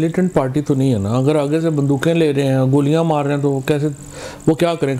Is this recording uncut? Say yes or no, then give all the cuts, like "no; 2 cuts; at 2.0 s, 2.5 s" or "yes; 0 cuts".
yes; 0 cuts